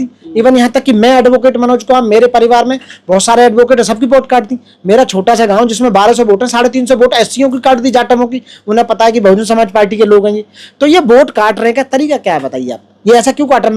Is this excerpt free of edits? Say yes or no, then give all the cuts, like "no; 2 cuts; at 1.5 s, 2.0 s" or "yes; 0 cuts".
yes; 0 cuts